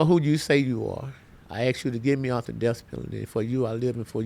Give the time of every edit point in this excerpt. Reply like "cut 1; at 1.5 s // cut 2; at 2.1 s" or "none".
none